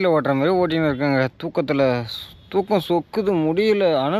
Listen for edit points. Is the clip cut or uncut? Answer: uncut